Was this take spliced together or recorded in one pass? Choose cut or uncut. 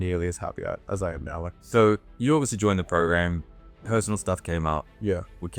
cut